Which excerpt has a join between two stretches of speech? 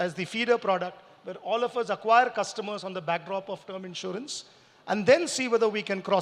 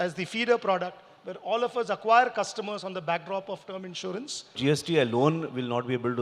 second; 1 cut; at 4.6 s

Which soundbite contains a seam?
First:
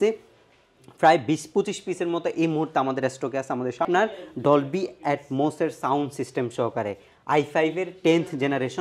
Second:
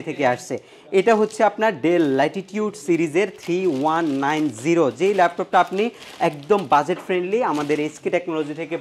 first; 1 cut; at 3.8 s

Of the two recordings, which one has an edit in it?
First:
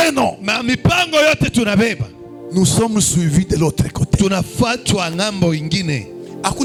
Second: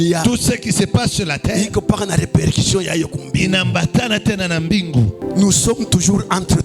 second; 1 cut; at 5.2 s

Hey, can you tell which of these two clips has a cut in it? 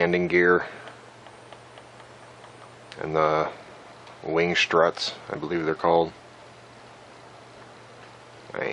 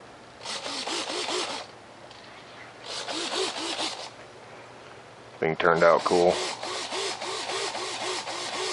second; 1 cut; at 7.7 s

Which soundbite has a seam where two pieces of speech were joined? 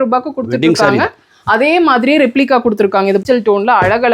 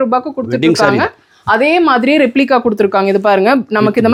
first; 1 cut; at 3.2 s

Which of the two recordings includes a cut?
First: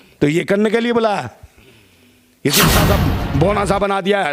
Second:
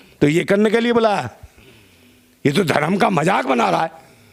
first; 1 cut; at 2.7 s

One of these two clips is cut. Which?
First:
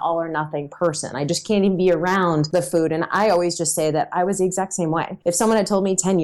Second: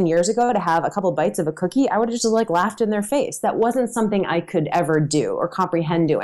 first; 2 cuts; at 2.5 s, 5.1 s

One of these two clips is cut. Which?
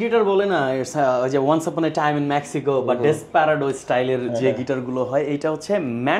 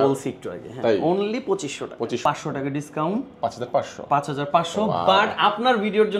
second; 1 cut; at 2.2 s

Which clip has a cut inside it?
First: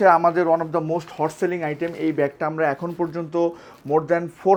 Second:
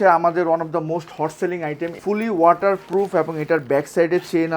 second; 1 cut; at 2.0 s

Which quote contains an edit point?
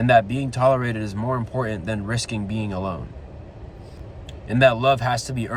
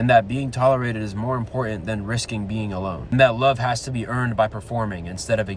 second; 1 cut; at 3.1 s

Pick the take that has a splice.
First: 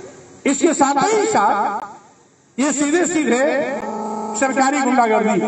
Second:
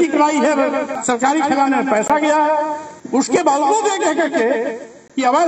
second; 2 cuts; at 0.9 s, 2.9 s

